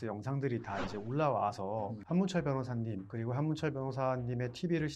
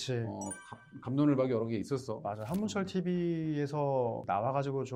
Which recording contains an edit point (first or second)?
first